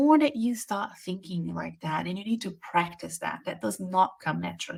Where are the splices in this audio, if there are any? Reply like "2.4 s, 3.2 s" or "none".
none